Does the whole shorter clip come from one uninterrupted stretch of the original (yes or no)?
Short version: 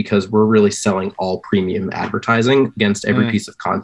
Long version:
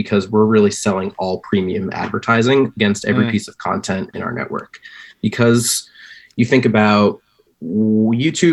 yes